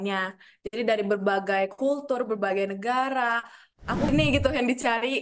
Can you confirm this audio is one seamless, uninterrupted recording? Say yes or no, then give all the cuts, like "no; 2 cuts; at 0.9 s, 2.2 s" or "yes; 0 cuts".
no; 1 cut; at 4.1 s